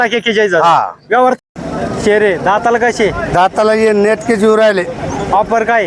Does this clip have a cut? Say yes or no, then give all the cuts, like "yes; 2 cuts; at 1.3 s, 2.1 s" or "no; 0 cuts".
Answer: yes; 1 cut; at 1.5 s